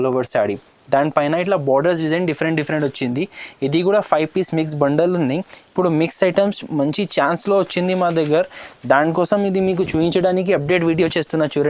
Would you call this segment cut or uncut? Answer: uncut